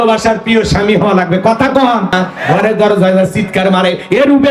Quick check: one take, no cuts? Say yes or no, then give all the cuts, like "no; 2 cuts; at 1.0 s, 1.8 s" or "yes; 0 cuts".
no; 1 cut; at 2.1 s